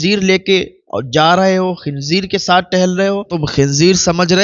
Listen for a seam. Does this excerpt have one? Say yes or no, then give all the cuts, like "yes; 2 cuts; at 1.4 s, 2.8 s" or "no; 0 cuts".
yes; 1 cut; at 3.4 s